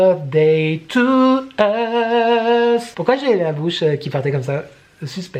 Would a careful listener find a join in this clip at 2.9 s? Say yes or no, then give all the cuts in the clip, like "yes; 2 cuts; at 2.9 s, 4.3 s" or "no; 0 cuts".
yes; 1 cut; at 2.9 s